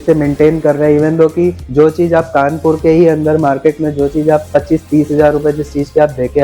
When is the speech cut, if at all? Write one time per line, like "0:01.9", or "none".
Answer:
none